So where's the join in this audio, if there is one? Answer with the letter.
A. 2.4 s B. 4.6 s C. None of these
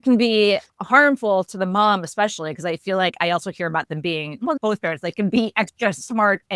B